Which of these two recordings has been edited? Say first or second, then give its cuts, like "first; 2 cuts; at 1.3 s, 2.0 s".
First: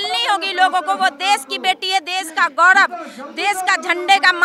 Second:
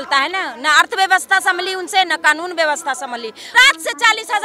second; 1 cut; at 3.4 s